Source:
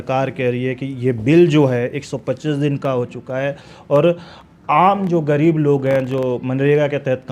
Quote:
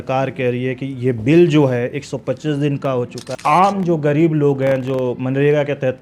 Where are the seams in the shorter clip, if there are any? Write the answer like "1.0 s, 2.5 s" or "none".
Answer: 3.2 s